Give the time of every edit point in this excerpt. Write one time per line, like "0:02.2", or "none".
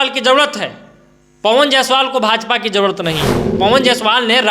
0:03.4